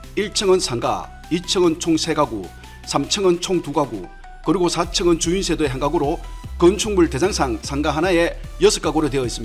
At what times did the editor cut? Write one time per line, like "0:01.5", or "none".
none